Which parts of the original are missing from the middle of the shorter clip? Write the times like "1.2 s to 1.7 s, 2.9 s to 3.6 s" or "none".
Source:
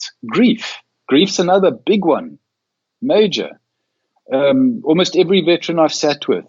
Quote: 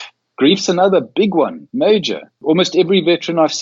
2.3 s to 2.9 s, 3.7 s to 4.8 s